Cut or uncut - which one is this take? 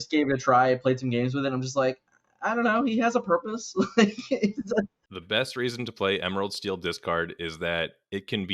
cut